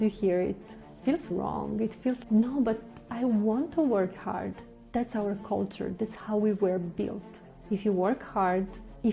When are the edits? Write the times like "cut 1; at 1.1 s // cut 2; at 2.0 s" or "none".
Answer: none